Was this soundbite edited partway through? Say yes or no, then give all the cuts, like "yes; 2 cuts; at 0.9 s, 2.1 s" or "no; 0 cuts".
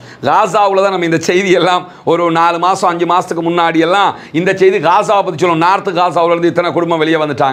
no; 0 cuts